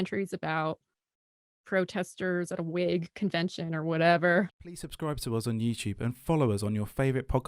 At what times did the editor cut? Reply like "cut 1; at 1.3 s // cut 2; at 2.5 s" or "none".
cut 1; at 4.5 s